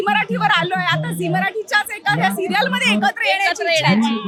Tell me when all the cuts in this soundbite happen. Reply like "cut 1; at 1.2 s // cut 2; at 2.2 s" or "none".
none